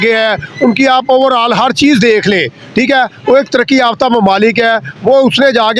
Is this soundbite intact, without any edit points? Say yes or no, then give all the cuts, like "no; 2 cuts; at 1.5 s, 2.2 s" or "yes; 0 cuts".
yes; 0 cuts